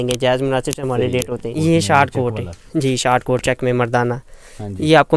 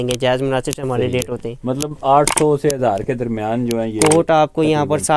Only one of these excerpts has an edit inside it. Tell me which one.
first; 1 cut; at 1.5 s

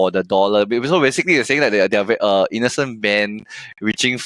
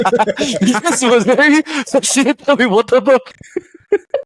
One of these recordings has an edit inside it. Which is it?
second; 1 cut; at 3.4 s

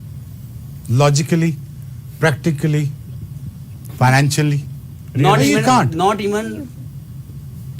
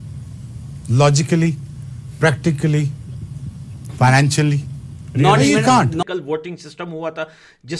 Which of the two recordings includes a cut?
second; 1 cut; at 6.0 s

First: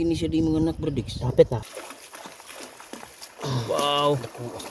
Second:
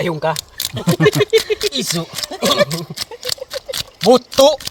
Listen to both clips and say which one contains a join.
first; 1 cut; at 1.7 s

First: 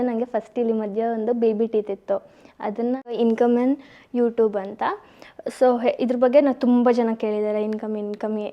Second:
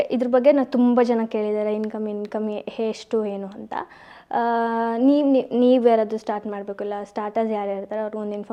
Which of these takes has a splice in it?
first; 1 cut; at 3.2 s

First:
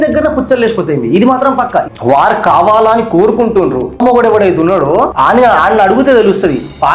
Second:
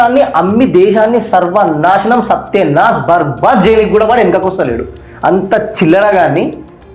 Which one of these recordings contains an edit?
first; 3 cuts; at 1.9 s, 4.0 s, 5.1 s

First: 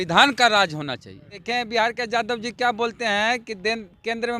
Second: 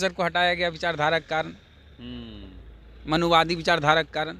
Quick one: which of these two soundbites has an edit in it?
first; 1 cut; at 1.4 s

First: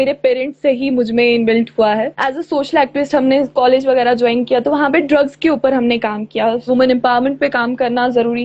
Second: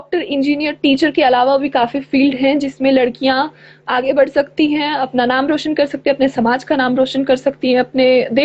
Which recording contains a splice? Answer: first; 2 cuts; at 2.1 s, 6.6 s

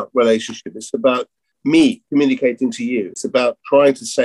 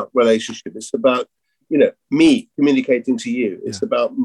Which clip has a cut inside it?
first; 2 cuts; at 1.5 s, 3.2 s

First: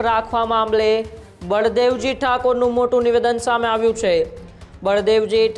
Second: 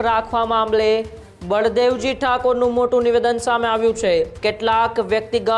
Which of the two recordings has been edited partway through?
second; 1 cut; at 4.3 s

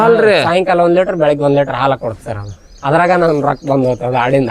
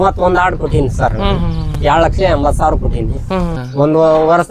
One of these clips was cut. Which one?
second; 1 cut; at 3.6 s

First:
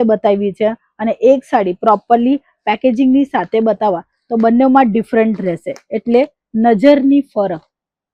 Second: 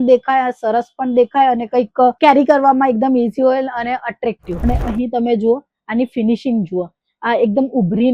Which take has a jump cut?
second; 1 cut; at 4.5 s

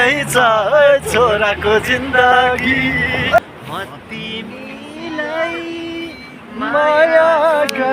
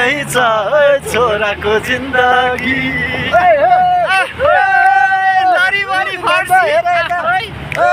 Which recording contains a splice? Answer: first; 1 cut; at 3.4 s

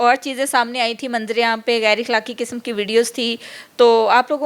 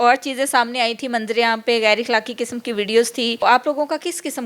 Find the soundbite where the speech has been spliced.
second; 1 cut; at 3.4 s

